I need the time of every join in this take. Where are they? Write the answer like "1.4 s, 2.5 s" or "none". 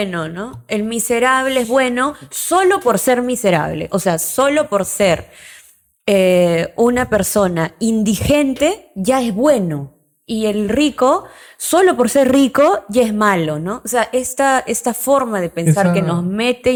none